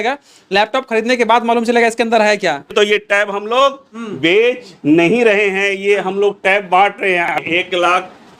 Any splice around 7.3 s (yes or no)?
yes